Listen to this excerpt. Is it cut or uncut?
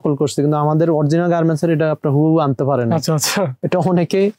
uncut